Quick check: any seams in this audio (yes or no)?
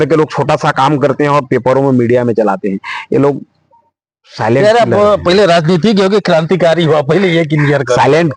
no